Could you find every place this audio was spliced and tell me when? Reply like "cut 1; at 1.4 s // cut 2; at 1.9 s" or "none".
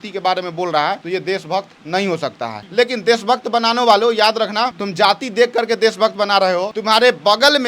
cut 1; at 1.0 s // cut 2; at 2.6 s // cut 3; at 4.8 s // cut 4; at 6.7 s

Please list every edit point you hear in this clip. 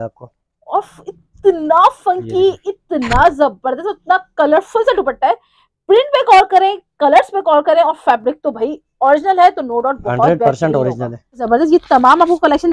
cut 1; at 11.4 s

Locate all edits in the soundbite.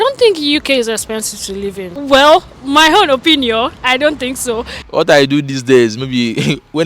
cut 1; at 1.9 s // cut 2; at 4.9 s

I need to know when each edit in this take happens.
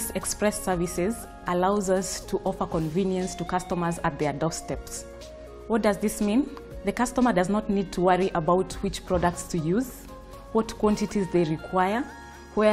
none

